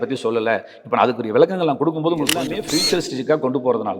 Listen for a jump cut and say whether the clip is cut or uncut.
cut